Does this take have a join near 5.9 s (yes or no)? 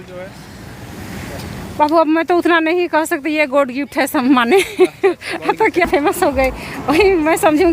yes